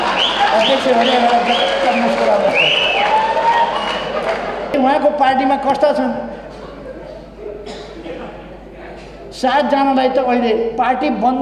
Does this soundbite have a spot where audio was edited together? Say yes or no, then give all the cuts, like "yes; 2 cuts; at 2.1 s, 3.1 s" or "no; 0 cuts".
yes; 1 cut; at 4.7 s